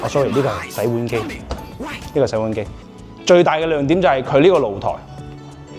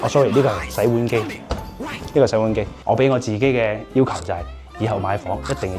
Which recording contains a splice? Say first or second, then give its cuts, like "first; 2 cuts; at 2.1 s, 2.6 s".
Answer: second; 1 cut; at 2.7 s